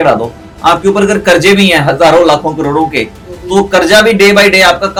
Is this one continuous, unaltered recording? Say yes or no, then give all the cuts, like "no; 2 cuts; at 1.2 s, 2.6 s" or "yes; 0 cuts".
yes; 0 cuts